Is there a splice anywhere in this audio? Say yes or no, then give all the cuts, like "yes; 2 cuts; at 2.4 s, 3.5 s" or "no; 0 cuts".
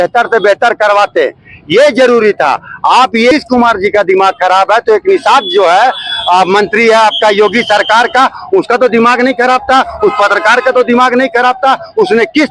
yes; 1 cut; at 3.3 s